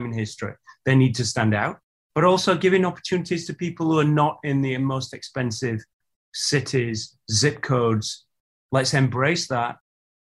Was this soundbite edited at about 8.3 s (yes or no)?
yes